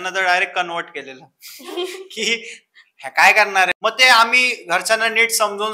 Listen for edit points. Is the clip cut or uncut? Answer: cut